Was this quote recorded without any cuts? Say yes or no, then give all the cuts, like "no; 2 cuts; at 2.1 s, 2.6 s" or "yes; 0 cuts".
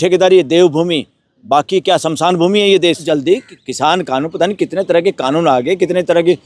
no; 1 cut; at 3.0 s